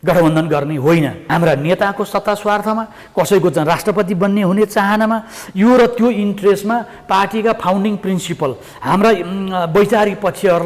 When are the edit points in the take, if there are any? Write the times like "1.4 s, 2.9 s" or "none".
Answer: 1.2 s

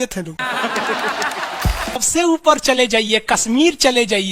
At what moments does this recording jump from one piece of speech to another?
2.0 s

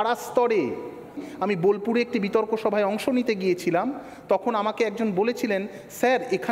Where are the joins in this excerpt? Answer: 1.3 s

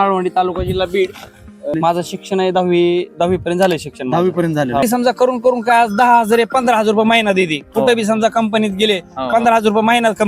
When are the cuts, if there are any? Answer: 1.7 s, 4.8 s

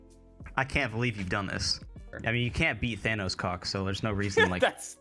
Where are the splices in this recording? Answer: 2.1 s

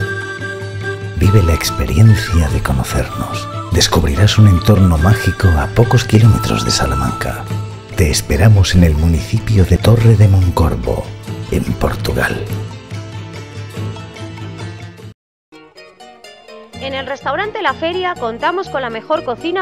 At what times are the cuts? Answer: none

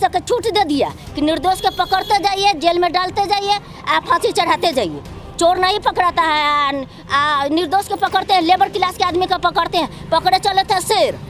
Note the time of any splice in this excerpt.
none

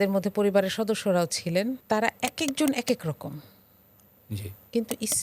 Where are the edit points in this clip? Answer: 1.8 s

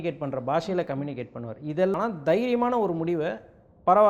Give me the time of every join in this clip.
2.0 s

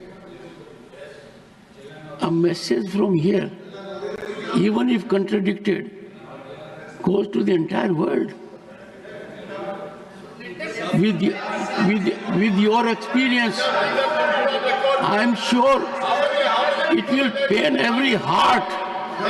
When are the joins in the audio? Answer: none

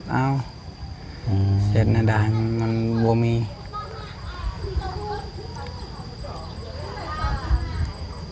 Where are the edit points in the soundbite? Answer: none

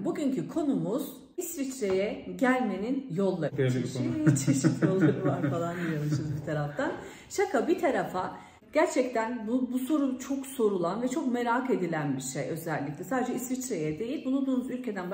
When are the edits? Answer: 1.5 s, 3.5 s, 8.5 s

